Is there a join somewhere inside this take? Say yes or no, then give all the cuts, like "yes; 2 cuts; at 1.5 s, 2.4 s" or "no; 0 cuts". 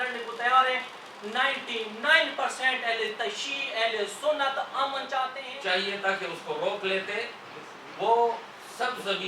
yes; 1 cut; at 5.5 s